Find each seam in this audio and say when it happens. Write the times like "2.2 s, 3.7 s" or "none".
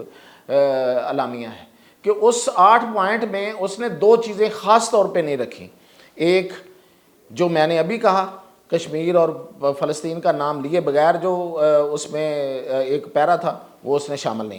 none

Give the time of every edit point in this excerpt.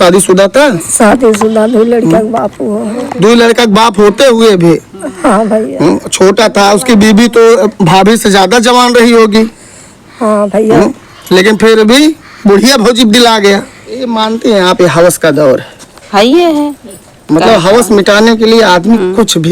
14.1 s

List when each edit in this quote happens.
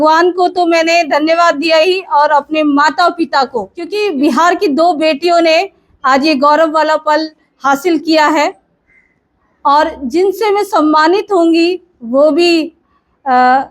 3.8 s

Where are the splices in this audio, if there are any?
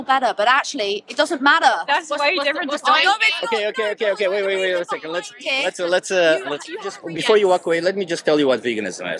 7.0 s

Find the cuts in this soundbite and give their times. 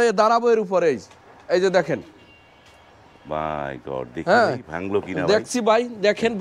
none

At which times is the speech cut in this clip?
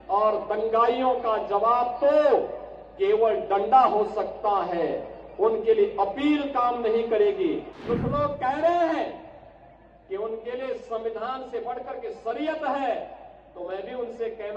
7.7 s

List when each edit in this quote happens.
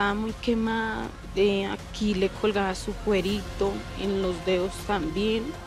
none

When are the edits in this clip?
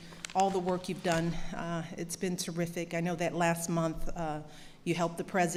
none

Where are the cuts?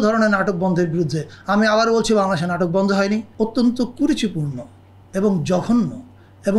3.3 s

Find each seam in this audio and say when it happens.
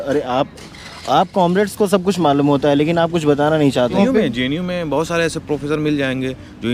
4.0 s

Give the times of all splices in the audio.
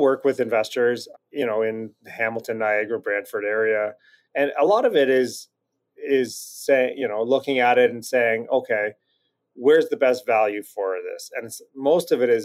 1.1 s

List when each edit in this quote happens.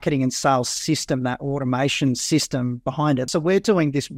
3.3 s

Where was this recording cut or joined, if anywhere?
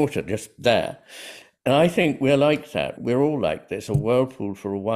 3.9 s

